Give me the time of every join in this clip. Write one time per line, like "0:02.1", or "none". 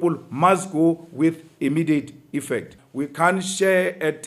0:02.8